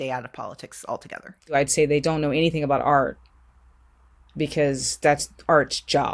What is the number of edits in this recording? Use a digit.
1